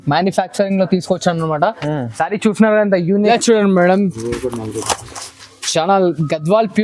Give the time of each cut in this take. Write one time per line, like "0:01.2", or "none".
0:03.3